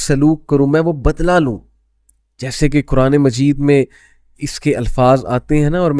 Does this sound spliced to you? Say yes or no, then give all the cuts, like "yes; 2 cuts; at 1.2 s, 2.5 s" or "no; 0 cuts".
no; 0 cuts